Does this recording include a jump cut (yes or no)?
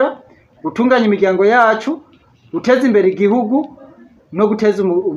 no